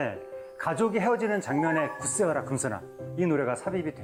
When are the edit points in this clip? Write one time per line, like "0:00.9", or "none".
none